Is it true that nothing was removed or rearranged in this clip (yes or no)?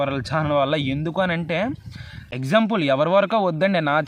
no